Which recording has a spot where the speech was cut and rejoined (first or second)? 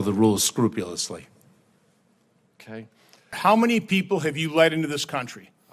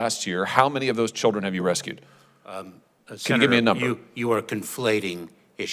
first